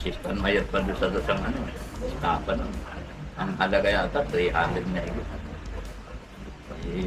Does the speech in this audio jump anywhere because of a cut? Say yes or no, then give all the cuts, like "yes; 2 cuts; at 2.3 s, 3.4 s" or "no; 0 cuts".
no; 0 cuts